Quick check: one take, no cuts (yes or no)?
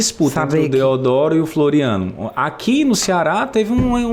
yes